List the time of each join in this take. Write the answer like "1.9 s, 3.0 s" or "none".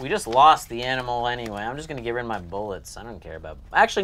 none